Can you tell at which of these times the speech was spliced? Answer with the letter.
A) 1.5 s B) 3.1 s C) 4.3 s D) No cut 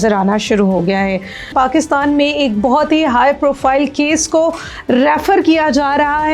A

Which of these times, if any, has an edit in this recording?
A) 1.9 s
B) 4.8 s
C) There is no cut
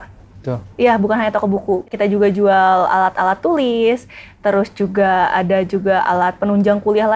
A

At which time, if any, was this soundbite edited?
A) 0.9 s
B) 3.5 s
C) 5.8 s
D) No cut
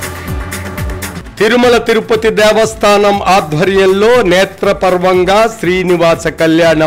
A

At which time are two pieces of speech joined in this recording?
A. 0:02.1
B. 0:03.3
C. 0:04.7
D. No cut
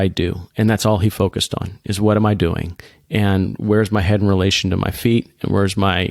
D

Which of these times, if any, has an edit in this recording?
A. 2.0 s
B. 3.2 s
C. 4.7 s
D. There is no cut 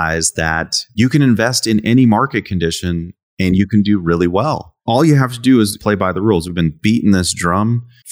C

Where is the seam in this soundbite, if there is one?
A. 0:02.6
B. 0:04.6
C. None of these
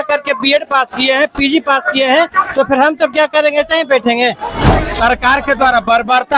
B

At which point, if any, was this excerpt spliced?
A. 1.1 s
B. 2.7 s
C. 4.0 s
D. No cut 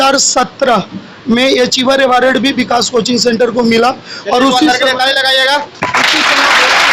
D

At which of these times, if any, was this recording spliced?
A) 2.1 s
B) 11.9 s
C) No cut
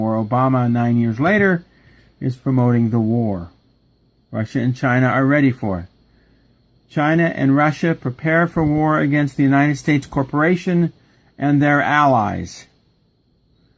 B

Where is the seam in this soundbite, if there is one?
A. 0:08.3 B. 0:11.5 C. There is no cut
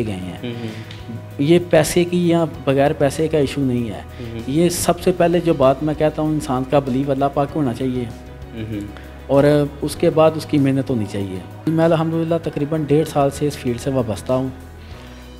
B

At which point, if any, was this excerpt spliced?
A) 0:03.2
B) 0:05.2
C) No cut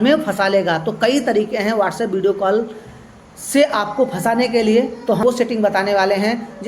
B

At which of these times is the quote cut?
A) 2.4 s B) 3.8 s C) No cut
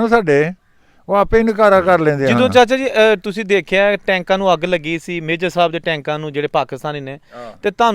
A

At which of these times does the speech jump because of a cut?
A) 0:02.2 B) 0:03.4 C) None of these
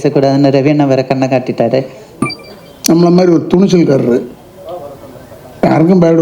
A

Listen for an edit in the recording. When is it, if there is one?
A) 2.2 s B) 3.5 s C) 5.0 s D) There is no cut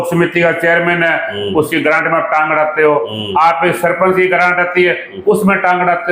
D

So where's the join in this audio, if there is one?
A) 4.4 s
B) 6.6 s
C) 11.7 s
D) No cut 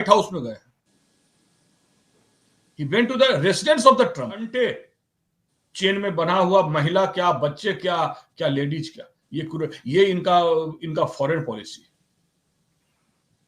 A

